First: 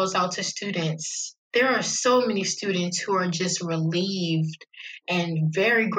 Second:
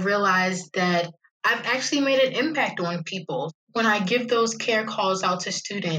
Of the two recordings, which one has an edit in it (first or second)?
second